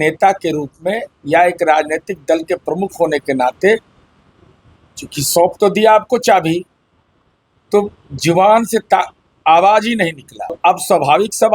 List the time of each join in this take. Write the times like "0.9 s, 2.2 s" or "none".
10.6 s